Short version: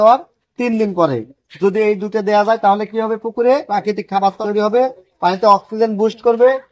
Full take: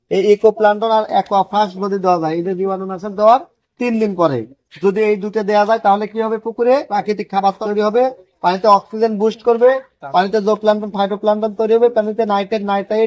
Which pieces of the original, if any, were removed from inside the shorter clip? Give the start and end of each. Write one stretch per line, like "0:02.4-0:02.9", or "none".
none